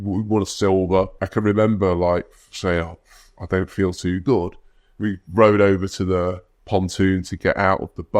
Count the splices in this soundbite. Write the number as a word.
two